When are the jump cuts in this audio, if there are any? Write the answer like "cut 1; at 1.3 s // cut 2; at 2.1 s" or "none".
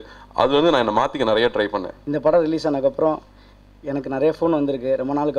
cut 1; at 1.9 s